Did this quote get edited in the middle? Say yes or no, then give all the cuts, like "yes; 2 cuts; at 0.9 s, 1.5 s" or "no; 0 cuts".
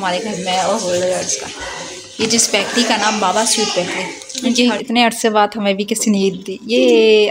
yes; 1 cut; at 4.8 s